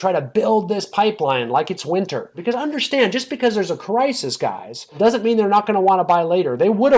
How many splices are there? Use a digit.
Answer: 2